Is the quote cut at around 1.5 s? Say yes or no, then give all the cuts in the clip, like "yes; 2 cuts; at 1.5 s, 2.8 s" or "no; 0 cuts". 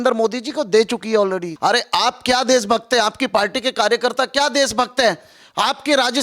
yes; 1 cut; at 1.5 s